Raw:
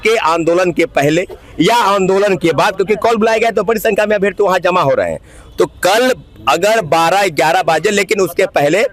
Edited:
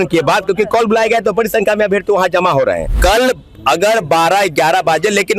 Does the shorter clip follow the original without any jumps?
no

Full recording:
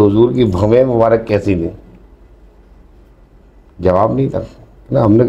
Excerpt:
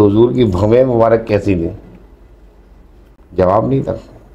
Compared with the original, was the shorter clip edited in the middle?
yes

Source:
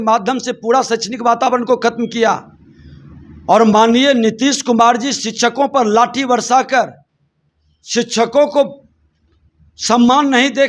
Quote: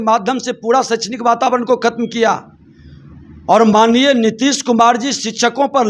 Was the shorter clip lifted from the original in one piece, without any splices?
yes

